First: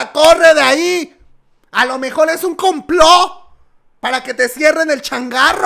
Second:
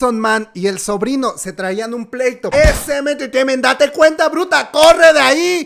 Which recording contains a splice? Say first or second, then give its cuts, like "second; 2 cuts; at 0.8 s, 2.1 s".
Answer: second; 1 cut; at 2.4 s